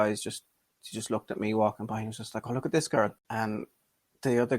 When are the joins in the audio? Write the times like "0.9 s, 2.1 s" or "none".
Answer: 3.2 s